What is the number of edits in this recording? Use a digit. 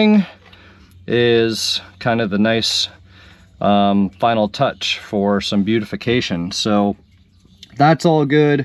0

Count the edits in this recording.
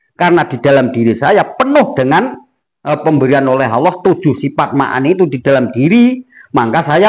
0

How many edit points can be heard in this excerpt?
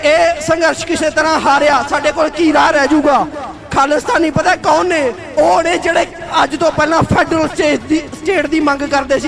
0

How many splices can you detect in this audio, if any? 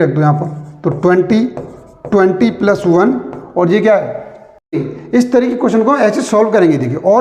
1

